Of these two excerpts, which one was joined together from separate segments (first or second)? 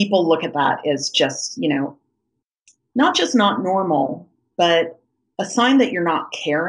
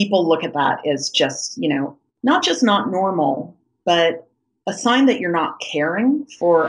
second